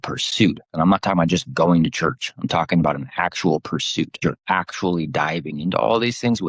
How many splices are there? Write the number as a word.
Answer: one